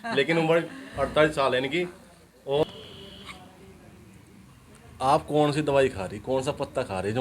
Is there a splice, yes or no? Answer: yes